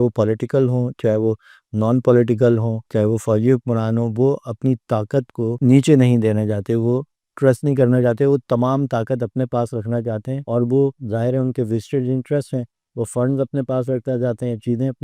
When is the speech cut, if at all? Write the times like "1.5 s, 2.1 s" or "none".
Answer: 5.5 s

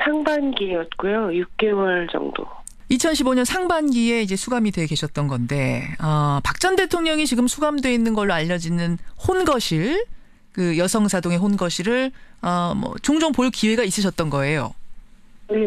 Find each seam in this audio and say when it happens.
none

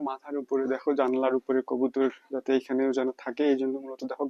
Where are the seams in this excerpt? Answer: none

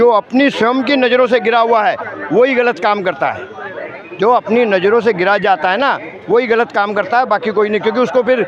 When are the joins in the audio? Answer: none

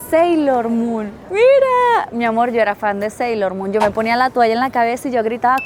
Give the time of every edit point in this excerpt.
none

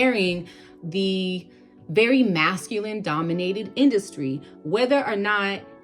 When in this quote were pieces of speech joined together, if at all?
none

